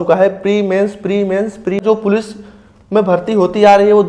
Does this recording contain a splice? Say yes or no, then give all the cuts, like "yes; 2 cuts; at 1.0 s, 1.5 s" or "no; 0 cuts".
yes; 1 cut; at 1.8 s